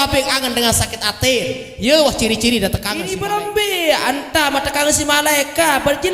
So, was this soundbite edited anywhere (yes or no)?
yes